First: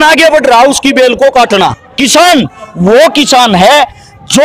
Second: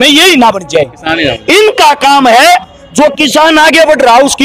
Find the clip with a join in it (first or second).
first